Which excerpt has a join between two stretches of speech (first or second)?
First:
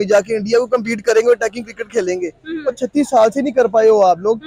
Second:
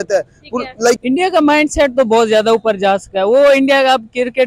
second